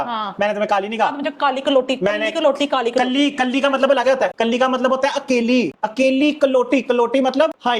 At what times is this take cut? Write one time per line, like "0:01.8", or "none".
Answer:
none